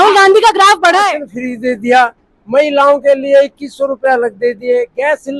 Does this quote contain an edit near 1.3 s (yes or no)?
yes